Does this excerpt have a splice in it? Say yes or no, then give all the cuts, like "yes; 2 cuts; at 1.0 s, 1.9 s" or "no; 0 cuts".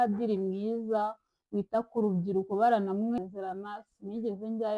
yes; 1 cut; at 3.2 s